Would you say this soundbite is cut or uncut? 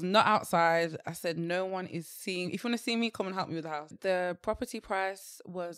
cut